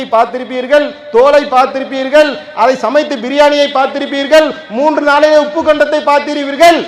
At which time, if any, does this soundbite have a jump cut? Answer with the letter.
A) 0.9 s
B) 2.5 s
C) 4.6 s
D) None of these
D